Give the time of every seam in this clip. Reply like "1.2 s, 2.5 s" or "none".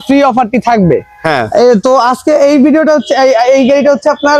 none